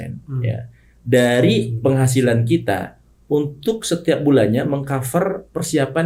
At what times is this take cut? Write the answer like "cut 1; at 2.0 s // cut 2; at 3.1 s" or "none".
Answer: none